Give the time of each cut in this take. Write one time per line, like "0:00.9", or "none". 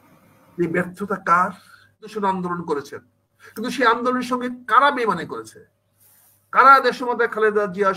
0:02.1